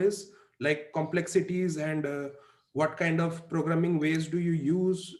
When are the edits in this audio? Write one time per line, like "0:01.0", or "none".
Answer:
none